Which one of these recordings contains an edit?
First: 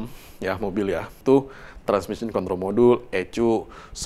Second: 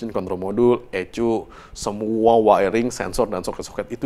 first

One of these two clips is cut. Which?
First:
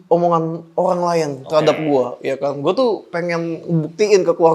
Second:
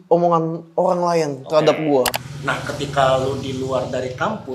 second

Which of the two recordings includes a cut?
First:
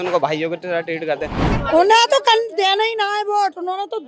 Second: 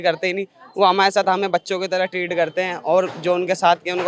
first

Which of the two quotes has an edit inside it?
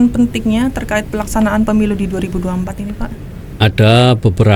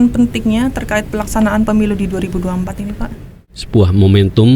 second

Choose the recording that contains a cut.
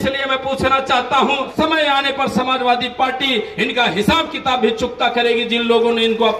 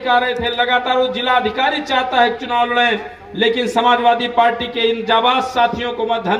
first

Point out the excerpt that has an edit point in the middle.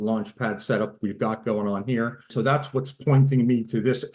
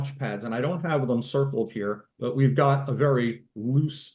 first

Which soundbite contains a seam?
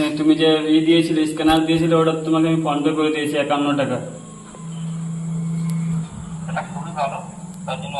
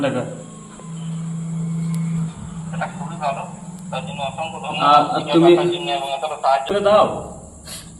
second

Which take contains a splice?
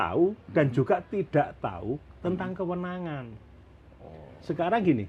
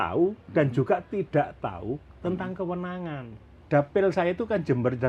second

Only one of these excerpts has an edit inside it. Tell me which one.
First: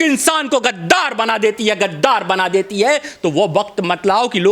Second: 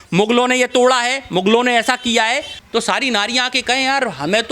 second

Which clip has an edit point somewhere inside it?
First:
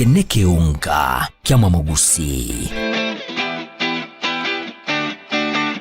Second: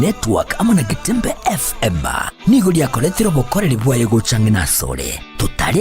second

